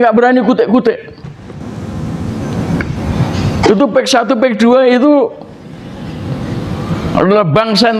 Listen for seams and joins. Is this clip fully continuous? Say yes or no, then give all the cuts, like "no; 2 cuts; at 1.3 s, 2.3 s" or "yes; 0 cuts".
yes; 0 cuts